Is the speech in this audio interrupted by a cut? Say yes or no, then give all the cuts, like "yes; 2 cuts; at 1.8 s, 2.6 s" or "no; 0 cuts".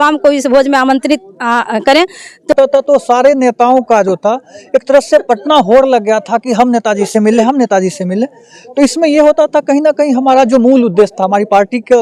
yes; 1 cut; at 2.5 s